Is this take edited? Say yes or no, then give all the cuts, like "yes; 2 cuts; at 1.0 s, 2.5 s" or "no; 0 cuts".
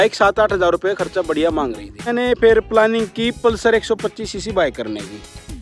yes; 1 cut; at 2.1 s